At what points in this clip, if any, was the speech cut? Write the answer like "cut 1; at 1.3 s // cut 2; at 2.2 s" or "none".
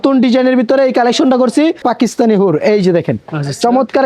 cut 1; at 1.9 s

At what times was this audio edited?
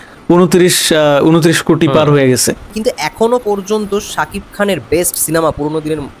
cut 1; at 2.8 s

